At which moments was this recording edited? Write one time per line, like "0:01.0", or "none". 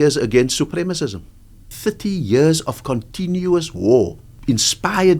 0:01.7
0:04.3